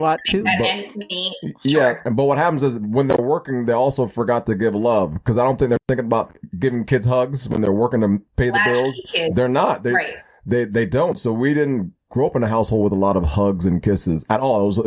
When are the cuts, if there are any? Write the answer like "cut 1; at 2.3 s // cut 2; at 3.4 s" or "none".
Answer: none